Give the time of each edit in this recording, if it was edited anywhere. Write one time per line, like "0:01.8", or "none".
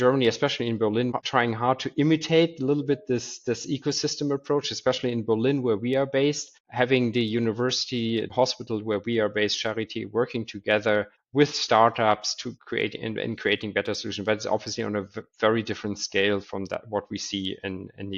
0:01.1